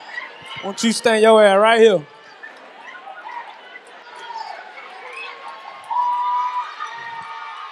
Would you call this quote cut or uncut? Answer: uncut